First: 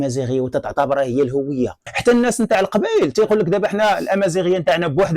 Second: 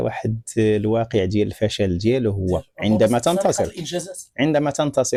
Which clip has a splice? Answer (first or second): first